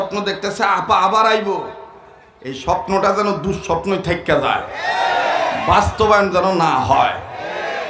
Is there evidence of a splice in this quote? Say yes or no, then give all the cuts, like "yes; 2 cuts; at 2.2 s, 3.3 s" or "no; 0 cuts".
no; 0 cuts